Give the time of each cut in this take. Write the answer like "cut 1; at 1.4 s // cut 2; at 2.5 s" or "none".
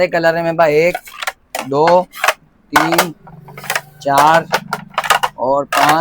none